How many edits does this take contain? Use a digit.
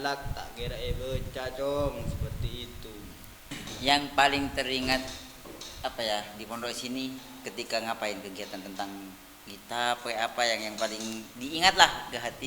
1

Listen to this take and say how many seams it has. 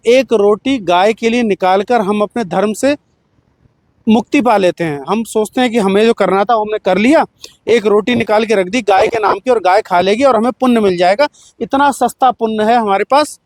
0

